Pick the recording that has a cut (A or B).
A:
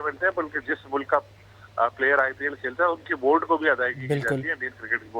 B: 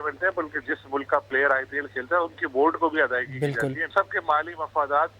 B